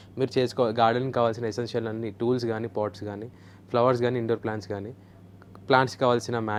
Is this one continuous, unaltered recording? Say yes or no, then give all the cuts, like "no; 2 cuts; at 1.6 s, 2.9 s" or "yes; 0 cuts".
yes; 0 cuts